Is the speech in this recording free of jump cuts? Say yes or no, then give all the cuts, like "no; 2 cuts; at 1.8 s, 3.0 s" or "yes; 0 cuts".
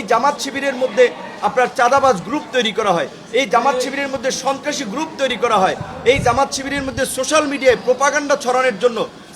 yes; 0 cuts